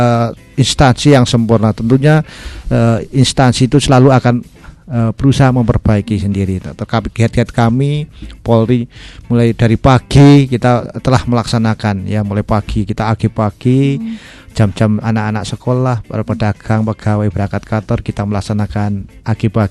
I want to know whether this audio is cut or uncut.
uncut